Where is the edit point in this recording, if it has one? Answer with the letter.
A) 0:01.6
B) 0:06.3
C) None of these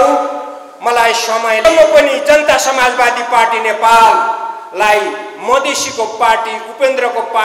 A